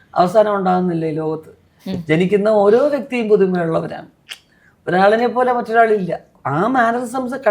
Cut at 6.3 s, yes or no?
yes